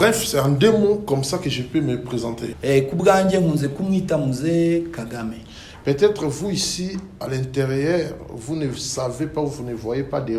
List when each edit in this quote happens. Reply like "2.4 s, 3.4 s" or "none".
2.5 s